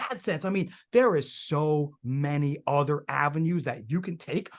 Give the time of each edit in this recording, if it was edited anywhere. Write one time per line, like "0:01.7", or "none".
none